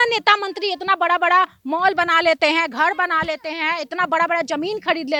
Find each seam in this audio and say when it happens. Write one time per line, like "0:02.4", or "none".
none